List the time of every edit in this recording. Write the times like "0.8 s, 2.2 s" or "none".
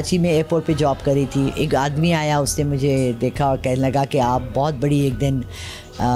none